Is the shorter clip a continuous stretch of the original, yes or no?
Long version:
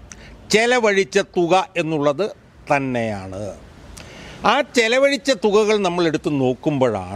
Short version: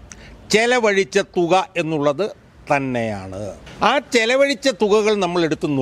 no